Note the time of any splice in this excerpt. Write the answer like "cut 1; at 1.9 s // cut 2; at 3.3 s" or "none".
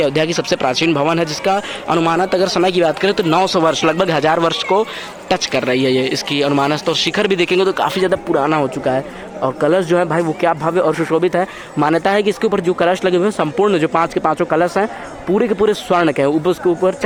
none